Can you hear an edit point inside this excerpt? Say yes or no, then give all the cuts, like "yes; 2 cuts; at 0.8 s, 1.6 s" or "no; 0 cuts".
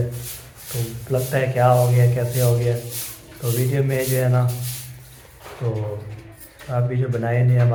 no; 0 cuts